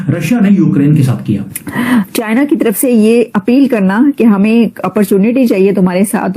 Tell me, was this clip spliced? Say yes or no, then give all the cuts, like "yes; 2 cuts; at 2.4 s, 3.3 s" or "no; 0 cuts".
yes; 1 cut; at 2.1 s